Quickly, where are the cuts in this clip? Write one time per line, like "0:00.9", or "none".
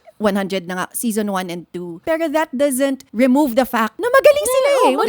0:01.9
0:03.0
0:03.9

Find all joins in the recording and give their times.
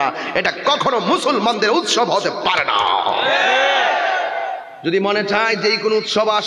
0:04.7

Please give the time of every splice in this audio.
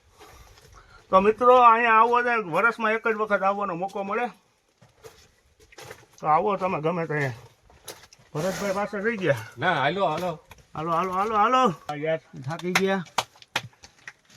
0:11.9

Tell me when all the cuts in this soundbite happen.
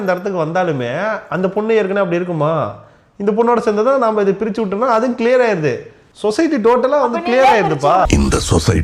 none

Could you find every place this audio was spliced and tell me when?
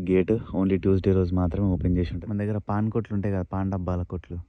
0:02.2

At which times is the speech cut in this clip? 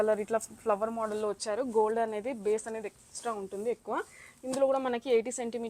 none

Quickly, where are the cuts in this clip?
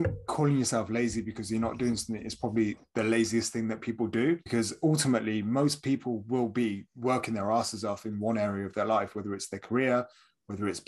0:04.4

